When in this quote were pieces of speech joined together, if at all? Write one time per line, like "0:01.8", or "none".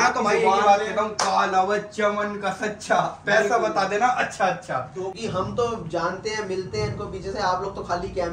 0:05.1